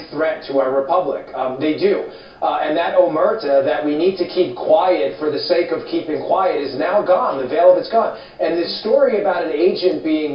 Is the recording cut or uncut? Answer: uncut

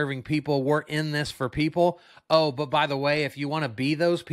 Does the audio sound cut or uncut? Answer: uncut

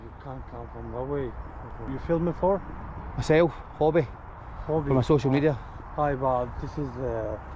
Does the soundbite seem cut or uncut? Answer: cut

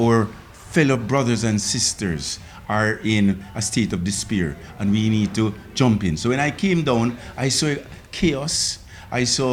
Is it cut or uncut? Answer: uncut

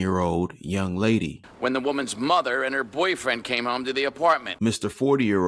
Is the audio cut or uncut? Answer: cut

